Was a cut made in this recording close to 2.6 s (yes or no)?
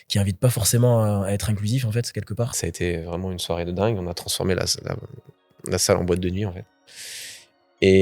yes